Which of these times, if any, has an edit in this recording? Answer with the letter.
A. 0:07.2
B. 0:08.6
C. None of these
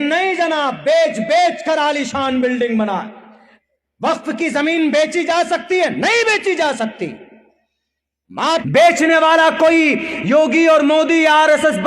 B